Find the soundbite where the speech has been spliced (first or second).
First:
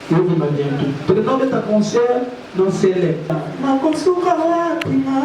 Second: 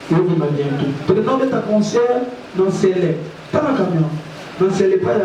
first